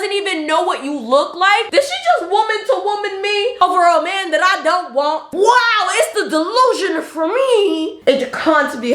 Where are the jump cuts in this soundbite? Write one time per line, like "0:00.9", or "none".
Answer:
0:01.7
0:07.9